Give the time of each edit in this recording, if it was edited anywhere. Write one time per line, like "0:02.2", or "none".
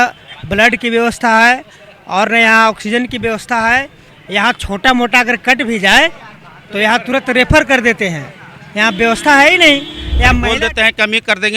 0:10.4